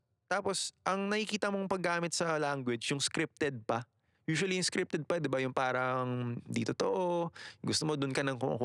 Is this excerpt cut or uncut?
uncut